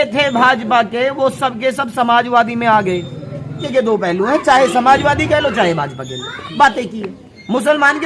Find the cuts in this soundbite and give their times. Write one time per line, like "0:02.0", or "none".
0:03.6